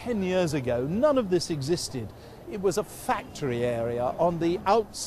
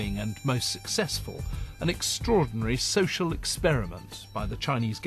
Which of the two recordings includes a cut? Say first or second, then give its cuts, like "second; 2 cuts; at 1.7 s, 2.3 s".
first; 1 cut; at 1.1 s